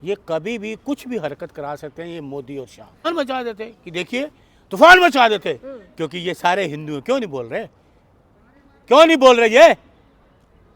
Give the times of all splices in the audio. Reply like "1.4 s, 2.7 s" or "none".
3.0 s